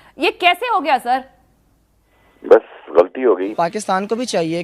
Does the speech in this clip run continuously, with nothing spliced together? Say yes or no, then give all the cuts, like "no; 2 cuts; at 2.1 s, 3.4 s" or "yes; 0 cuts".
no; 1 cut; at 3.5 s